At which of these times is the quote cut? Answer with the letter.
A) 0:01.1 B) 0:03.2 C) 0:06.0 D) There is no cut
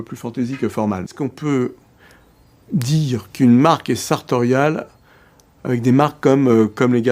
A